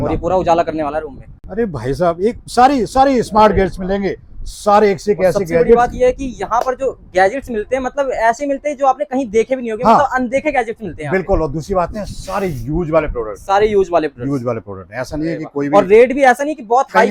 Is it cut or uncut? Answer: uncut